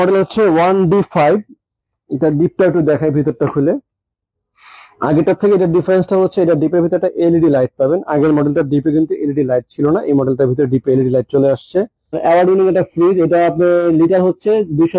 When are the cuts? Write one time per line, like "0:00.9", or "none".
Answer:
0:12.0